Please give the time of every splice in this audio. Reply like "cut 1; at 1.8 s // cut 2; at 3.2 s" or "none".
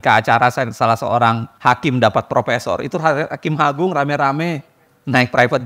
cut 1; at 1.5 s

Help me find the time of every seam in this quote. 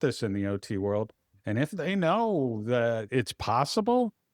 cut 1; at 3.0 s

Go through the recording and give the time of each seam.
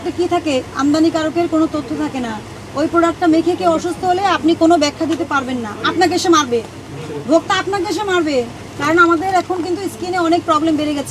cut 1; at 8.6 s

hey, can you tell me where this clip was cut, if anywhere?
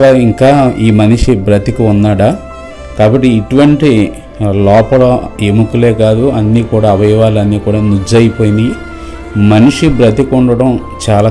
none

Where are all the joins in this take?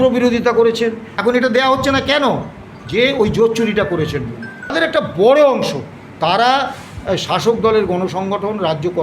cut 1; at 1.1 s // cut 2; at 4.7 s

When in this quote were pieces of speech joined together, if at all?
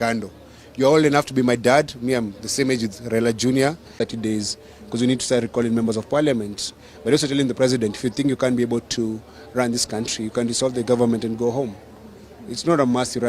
cut 1; at 3.9 s

